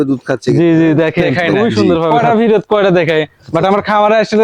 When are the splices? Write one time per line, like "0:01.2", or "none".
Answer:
0:02.1